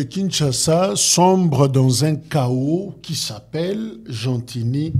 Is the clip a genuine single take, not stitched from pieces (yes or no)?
yes